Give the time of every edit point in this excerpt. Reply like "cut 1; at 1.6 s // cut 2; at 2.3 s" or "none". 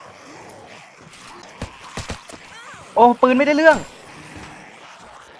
cut 1; at 1.5 s

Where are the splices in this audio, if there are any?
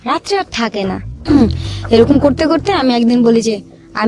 cut 1; at 1.1 s

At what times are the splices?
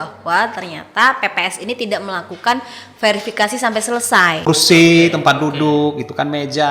cut 1; at 4.5 s

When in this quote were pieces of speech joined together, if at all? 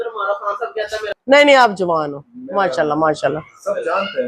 cut 1; at 1.1 s

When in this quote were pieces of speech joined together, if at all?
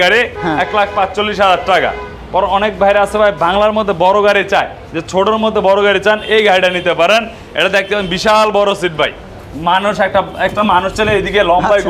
none

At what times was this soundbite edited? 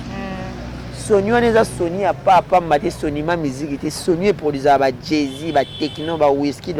none

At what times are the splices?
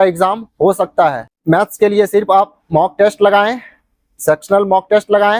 cut 1; at 1.3 s

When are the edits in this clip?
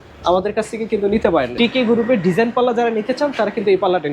cut 1; at 1.5 s

